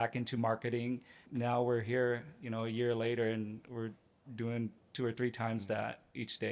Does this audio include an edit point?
yes; 1 cut; at 1.2 s

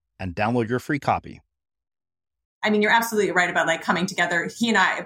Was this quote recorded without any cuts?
no; 1 cut; at 2.5 s

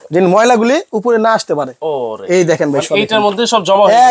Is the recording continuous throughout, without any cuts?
yes; 0 cuts

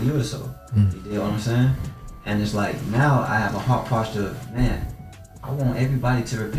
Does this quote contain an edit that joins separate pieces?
no; 0 cuts

